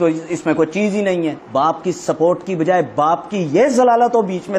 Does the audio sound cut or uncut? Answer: cut